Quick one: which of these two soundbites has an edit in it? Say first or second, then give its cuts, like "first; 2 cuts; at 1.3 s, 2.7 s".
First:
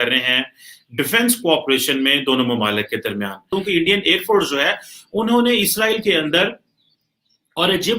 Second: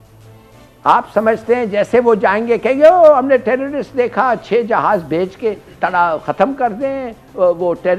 first; 1 cut; at 3.5 s